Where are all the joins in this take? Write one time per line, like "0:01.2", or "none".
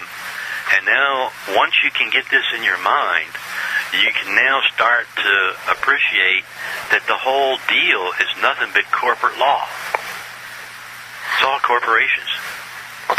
0:05.9